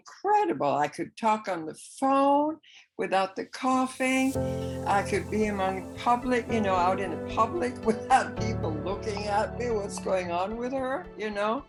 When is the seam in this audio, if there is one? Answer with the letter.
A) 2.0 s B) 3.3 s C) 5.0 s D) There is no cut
D